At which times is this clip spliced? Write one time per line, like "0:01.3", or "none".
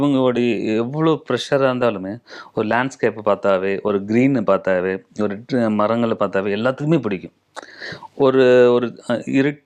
none